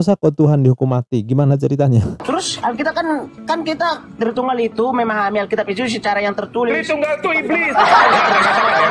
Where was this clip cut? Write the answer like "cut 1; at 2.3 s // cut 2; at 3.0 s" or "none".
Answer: cut 1; at 2.2 s

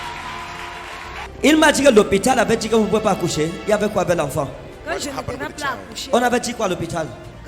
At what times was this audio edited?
cut 1; at 1.2 s

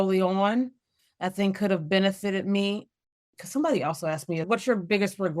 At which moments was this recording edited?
cut 1; at 3.4 s // cut 2; at 4.5 s

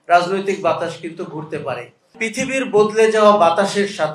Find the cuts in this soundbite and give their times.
cut 1; at 2.2 s

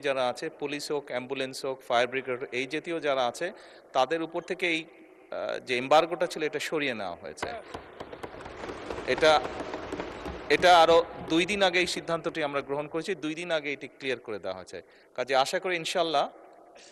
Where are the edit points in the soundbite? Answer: none

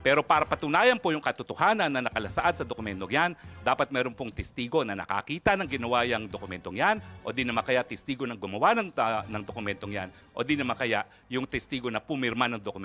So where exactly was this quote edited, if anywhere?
none

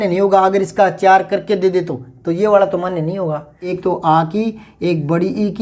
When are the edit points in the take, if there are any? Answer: cut 1; at 3.7 s

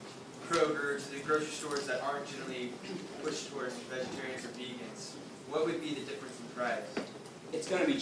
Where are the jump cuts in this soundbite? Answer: cut 1; at 5.5 s

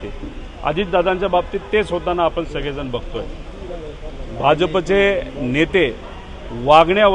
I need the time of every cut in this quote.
none

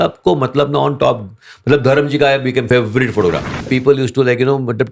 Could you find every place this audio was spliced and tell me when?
cut 1; at 2.7 s // cut 2; at 3.7 s

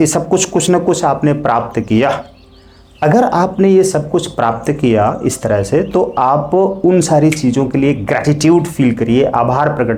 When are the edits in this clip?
none

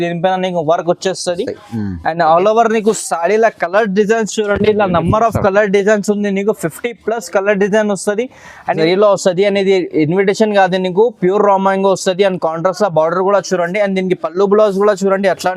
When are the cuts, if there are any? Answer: cut 1; at 8.8 s

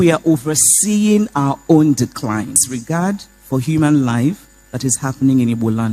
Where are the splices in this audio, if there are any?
cut 1; at 2.6 s

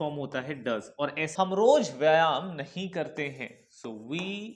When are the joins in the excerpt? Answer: cut 1; at 1.3 s

